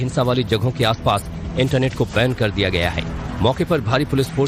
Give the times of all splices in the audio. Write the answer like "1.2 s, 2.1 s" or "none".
none